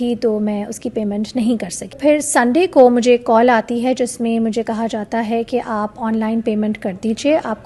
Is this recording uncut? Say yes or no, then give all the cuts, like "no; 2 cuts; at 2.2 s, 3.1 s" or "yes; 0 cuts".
no; 1 cut; at 1.9 s